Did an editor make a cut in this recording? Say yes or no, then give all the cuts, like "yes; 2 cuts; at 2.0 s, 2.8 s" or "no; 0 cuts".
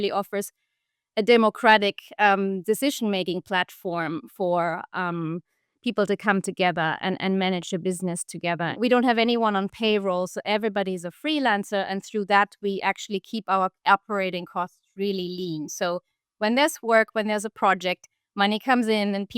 yes; 1 cut; at 8.7 s